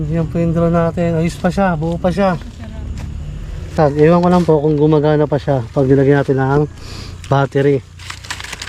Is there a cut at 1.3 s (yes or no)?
no